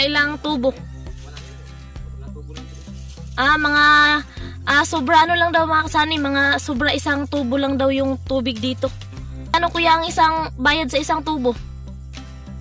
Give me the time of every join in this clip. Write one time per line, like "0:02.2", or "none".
0:09.5
0:11.6